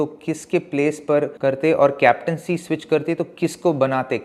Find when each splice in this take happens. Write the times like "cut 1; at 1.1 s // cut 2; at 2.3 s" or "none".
cut 1; at 1.3 s